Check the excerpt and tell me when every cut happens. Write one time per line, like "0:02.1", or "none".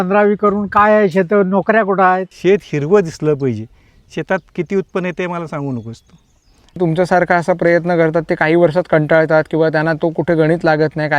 0:02.3
0:06.8

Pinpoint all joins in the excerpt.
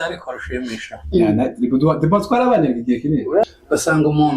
0:03.4

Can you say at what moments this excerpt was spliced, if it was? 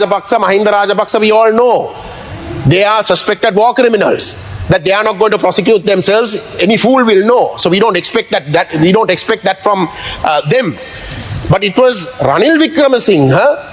none

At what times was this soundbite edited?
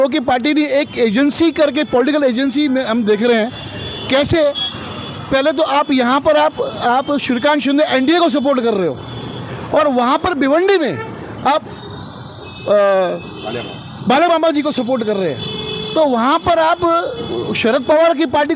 none

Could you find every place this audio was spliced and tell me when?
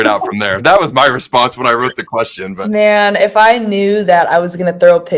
0:02.6

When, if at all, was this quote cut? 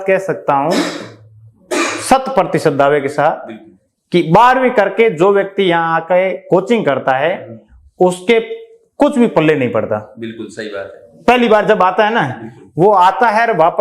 none

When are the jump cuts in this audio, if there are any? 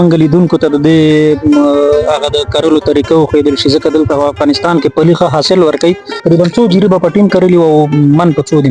0:06.2

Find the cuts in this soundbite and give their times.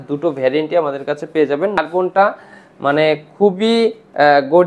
0:01.8

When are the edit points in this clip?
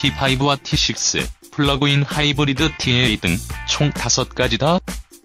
none

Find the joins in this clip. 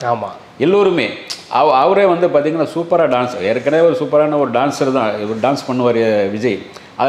none

